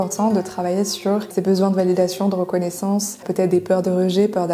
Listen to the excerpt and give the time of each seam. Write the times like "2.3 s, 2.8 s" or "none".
1.3 s, 3.2 s